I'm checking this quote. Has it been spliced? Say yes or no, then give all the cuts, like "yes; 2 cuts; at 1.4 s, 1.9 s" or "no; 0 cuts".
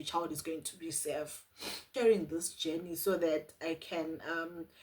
yes; 1 cut; at 1.8 s